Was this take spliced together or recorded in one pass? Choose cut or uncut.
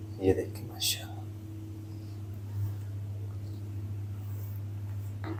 uncut